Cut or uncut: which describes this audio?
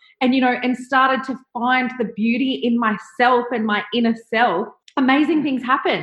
cut